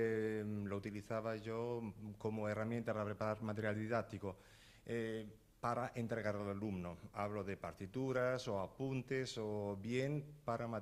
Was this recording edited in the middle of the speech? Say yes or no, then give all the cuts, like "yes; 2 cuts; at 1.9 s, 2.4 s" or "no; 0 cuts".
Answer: yes; 1 cut; at 3.4 s